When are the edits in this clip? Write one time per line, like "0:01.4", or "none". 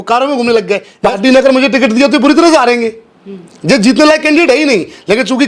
0:01.1